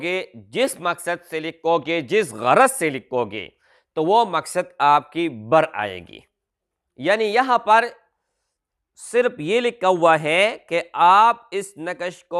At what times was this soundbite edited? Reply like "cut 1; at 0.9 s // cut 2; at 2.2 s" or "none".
none